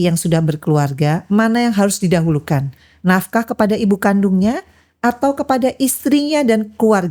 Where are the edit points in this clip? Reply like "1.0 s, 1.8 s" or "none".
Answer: none

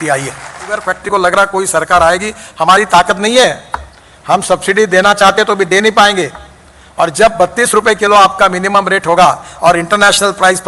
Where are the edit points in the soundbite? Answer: 1.0 s

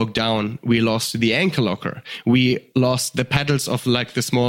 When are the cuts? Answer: 2.6 s

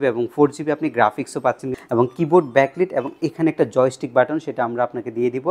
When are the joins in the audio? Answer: 1.8 s

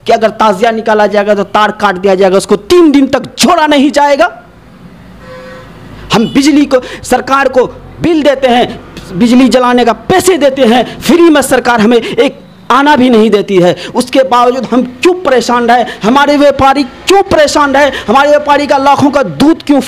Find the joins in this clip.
none

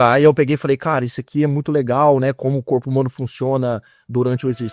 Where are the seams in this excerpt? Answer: none

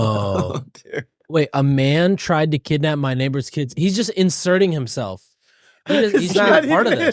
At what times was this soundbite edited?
none

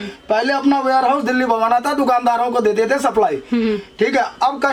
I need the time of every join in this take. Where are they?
none

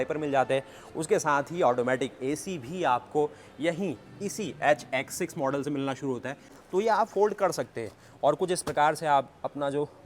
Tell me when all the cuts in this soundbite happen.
6.5 s

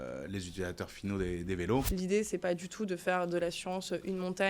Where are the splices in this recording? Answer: 1.9 s

